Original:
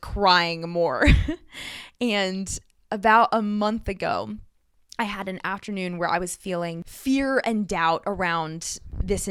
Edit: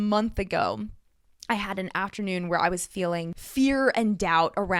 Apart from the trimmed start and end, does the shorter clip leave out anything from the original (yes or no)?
no